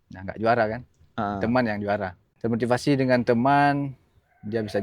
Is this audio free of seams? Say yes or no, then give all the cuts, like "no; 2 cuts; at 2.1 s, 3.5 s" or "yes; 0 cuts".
no; 1 cut; at 2.2 s